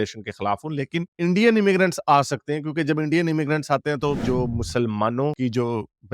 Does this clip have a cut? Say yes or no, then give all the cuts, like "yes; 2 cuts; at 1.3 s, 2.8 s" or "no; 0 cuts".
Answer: yes; 1 cut; at 4.2 s